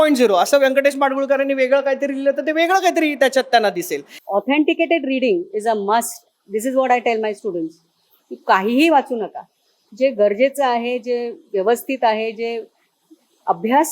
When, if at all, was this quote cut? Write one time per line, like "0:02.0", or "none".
0:04.1